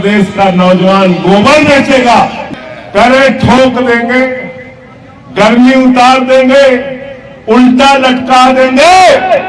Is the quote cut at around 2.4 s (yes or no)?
yes